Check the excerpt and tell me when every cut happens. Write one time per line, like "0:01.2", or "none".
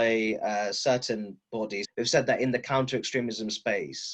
0:01.8